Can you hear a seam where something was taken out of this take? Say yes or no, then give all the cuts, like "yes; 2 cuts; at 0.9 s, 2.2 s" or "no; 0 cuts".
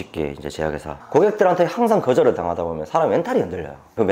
yes; 1 cut; at 0.9 s